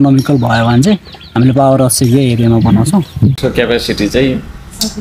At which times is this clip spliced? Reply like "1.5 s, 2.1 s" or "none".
3.4 s